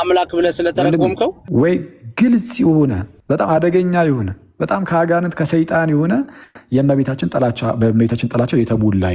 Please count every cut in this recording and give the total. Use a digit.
2